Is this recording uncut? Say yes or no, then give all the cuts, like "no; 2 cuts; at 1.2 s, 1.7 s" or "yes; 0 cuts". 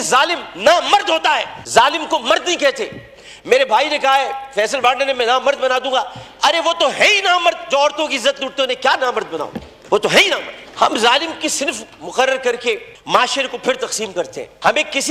yes; 0 cuts